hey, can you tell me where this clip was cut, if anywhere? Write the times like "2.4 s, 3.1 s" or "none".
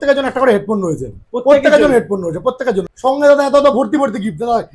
2.9 s

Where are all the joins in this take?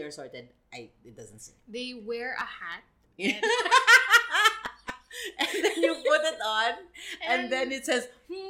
none

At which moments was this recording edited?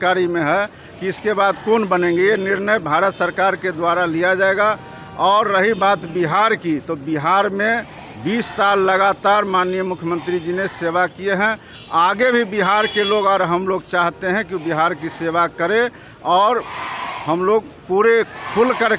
none

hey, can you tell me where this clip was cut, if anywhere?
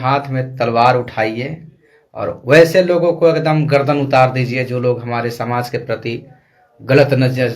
none

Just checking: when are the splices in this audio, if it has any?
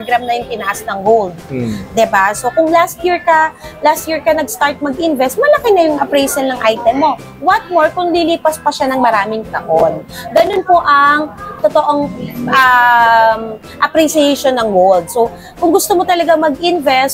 none

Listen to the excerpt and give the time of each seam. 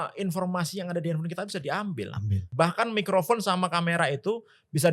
2.5 s

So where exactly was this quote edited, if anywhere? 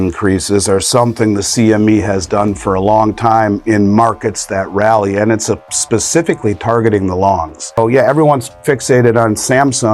7.8 s

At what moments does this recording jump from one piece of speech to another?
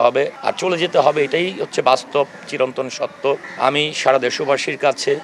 none

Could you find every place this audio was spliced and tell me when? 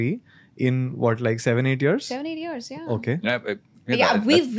none

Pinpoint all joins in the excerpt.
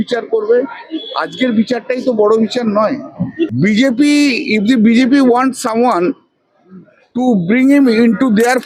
3.5 s

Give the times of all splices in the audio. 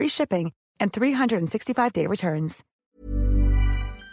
2.6 s

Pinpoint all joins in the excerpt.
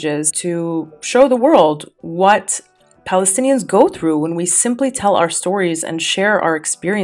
none

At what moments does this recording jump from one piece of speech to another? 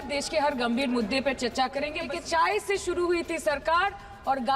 2.1 s

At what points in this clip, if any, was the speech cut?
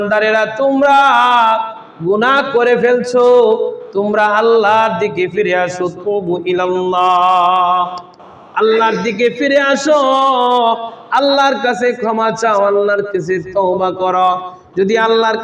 none

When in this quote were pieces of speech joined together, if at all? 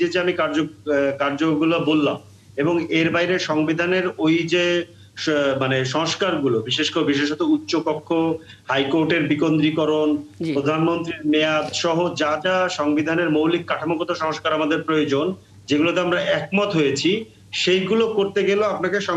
none

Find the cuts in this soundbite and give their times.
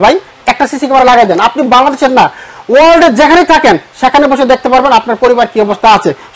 none

